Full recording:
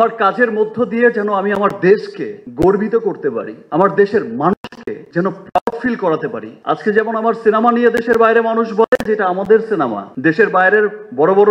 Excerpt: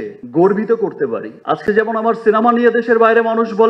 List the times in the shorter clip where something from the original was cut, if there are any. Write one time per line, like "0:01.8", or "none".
0:01.3